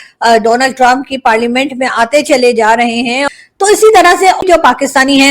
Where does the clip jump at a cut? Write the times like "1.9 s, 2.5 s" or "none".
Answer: 3.2 s, 4.4 s